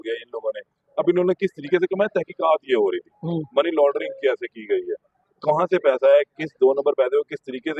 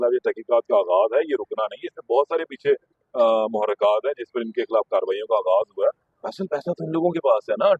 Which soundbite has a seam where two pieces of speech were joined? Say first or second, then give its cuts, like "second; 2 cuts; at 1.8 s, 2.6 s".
second; 1 cut; at 6.1 s